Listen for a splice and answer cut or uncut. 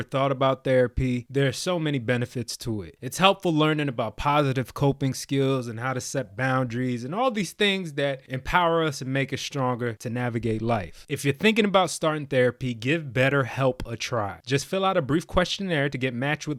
uncut